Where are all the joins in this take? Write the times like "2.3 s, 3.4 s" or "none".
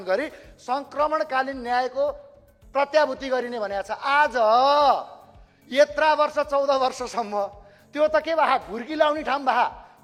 none